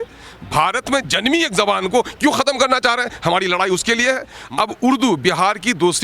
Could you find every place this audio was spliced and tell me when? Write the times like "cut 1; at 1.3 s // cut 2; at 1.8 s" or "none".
cut 1; at 4.3 s